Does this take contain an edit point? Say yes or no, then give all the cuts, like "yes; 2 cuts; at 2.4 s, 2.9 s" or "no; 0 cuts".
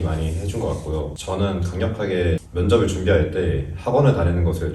yes; 2 cuts; at 1.2 s, 2.5 s